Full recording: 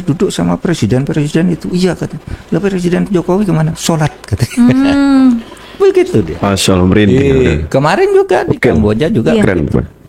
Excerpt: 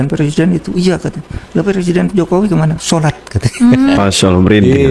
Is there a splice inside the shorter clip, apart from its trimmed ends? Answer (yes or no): yes